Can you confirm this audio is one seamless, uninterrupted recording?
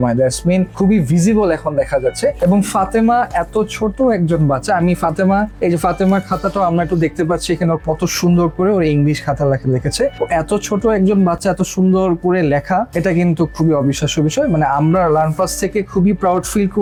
yes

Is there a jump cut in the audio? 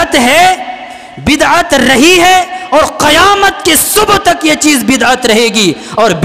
no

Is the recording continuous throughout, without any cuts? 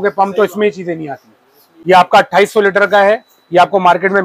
no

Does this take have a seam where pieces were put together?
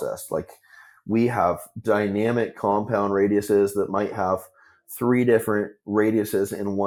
no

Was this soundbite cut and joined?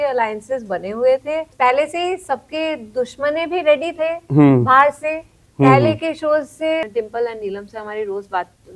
yes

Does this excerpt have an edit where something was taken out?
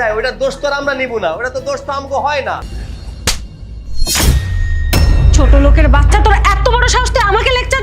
yes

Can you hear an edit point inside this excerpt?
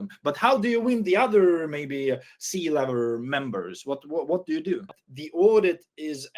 yes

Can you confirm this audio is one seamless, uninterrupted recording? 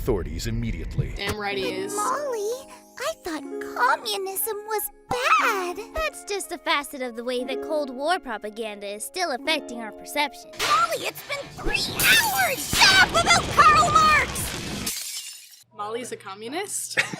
no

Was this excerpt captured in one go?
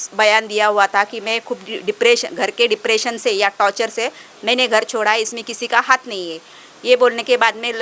yes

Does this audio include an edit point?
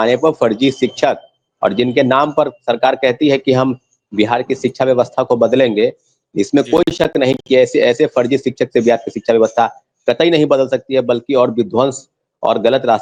no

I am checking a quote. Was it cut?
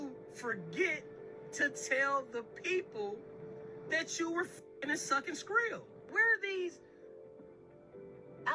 yes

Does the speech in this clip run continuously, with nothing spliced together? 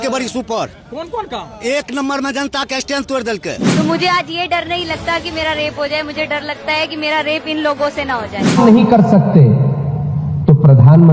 no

